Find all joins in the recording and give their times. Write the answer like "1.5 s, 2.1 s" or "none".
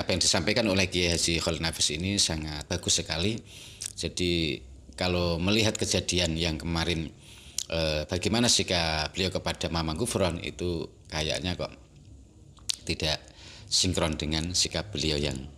none